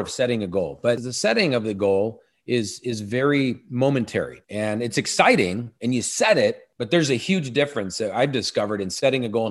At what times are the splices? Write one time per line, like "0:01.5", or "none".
0:01.1
0:04.4
0:06.7